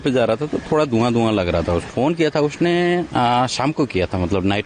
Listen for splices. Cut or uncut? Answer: cut